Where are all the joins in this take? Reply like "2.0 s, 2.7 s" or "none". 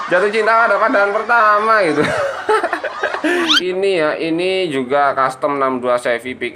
3.6 s